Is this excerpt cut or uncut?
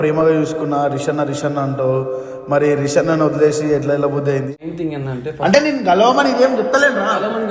cut